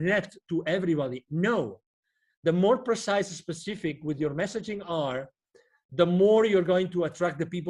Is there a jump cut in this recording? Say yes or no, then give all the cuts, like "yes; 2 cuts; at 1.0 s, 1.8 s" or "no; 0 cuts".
no; 0 cuts